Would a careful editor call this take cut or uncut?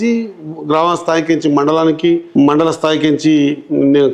cut